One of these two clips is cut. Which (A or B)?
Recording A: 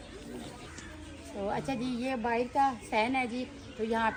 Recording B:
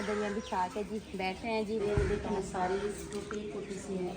B